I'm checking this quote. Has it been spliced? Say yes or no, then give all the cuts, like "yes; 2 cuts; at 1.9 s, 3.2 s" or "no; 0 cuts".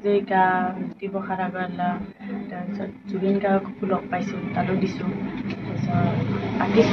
no; 0 cuts